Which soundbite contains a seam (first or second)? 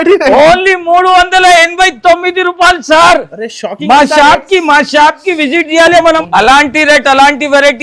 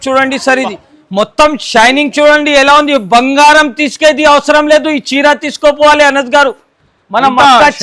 first